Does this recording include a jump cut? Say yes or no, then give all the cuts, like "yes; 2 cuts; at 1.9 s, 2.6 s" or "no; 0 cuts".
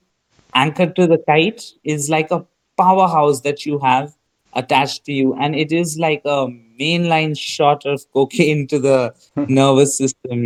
no; 0 cuts